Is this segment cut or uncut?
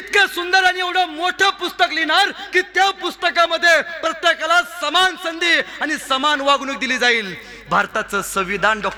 uncut